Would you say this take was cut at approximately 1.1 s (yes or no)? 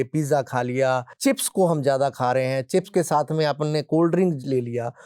yes